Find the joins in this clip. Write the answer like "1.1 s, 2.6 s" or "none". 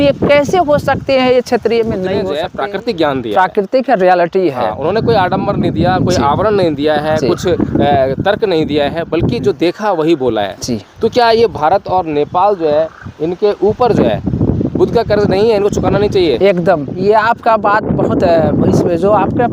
2.4 s